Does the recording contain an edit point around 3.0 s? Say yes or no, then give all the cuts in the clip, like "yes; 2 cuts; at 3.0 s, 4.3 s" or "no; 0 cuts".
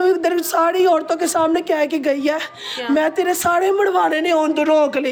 no; 0 cuts